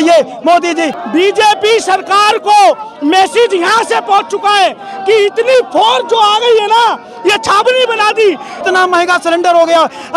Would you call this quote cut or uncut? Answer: cut